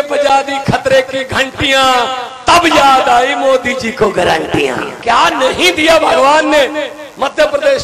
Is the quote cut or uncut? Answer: cut